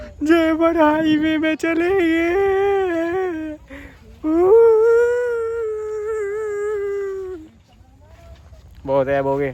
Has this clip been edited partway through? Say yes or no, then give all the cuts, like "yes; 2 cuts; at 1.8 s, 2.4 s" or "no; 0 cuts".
no; 0 cuts